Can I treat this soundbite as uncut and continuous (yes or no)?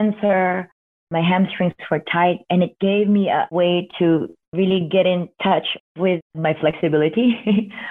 no